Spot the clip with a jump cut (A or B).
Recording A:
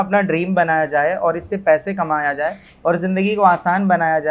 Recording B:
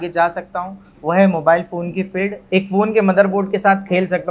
B